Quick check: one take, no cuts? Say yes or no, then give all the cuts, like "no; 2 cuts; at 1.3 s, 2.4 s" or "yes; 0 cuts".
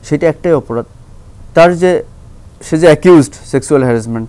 yes; 0 cuts